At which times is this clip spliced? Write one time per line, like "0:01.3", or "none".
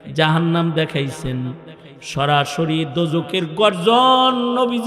none

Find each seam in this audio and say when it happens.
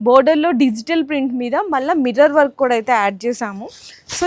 none

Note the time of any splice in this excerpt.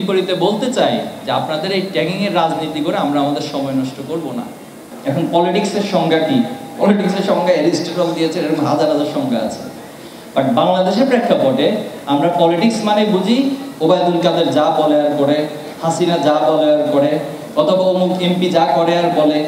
0:04.9

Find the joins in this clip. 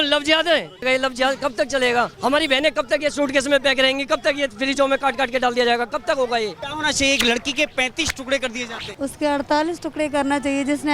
0:00.8
0:02.1
0:06.7
0:08.8

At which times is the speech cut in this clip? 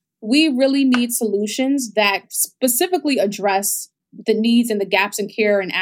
0:02.3

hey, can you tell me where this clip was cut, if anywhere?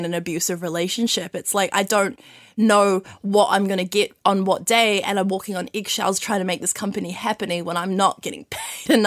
none

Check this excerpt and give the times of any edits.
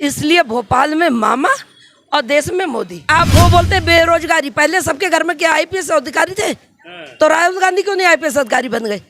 0:03.1

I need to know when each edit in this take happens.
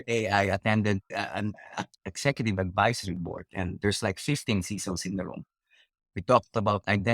0:01.1

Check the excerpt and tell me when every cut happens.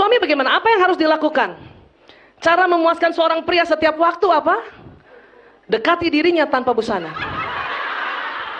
none

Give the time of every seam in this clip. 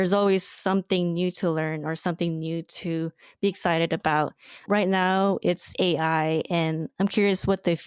0:04.6

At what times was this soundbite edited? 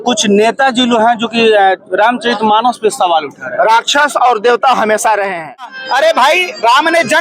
0:05.8

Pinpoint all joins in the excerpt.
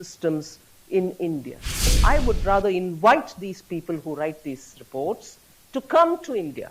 0:02.0

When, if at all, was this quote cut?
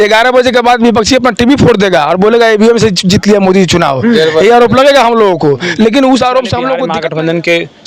0:06.8

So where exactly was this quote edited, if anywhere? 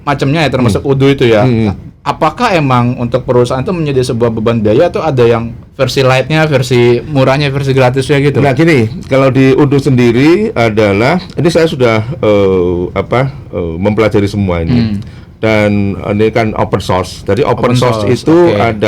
none

